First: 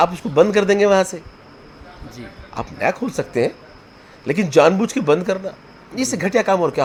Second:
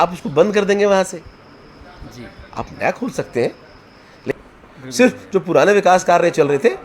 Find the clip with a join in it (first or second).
second